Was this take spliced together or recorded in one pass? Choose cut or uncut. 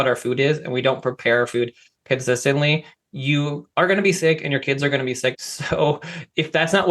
cut